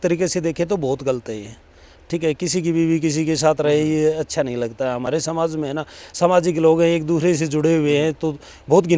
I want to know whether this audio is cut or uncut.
uncut